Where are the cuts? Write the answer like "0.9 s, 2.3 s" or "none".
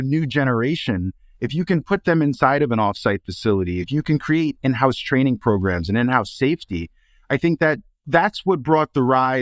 8.0 s